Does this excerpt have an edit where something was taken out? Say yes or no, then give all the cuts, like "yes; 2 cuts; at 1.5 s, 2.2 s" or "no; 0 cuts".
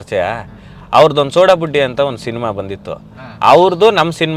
no; 0 cuts